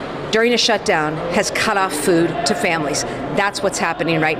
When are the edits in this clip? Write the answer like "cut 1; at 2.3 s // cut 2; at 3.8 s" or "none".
none